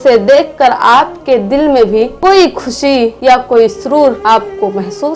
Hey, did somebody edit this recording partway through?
no; 0 cuts

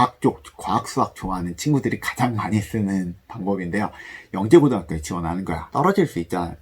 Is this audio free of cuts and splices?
no; 1 cut; at 5.7 s

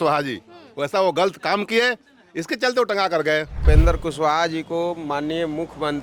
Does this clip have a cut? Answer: yes; 1 cut; at 3.5 s

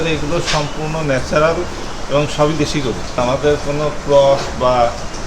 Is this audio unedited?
no; 1 cut; at 3.2 s

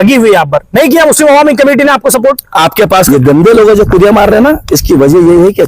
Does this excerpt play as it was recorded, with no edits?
no; 1 cut; at 3.1 s

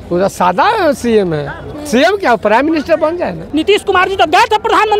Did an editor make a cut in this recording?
yes; 1 cut; at 3.4 s

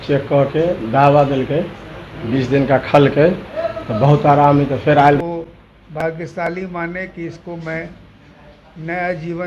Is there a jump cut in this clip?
yes; 1 cut; at 5.2 s

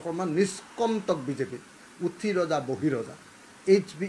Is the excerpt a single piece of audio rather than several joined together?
yes; 0 cuts

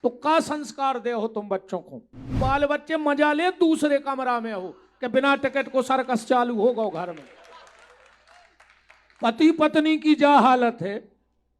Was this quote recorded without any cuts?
no; 1 cut; at 2.3 s

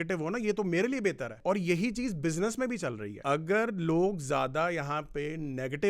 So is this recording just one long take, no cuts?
no; 2 cuts; at 1.4 s, 3.1 s

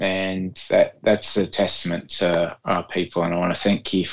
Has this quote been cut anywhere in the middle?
no; 0 cuts

